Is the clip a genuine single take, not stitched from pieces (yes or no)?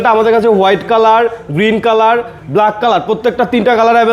yes